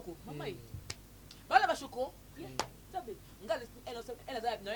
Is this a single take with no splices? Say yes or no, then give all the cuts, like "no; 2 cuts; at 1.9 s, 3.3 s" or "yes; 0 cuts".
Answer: yes; 0 cuts